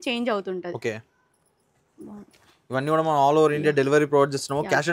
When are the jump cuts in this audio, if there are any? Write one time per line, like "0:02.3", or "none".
none